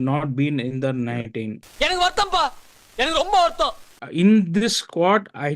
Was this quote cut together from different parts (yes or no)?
yes